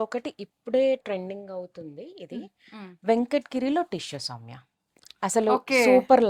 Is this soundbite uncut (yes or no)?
yes